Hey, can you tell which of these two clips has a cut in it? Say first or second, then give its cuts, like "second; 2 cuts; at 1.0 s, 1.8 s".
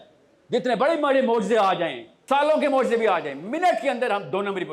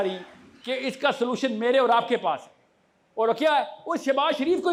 first; 1 cut; at 2.1 s